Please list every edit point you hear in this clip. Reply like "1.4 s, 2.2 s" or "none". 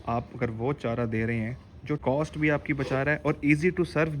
2.0 s